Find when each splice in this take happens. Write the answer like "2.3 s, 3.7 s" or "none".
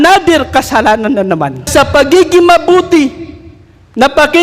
1.7 s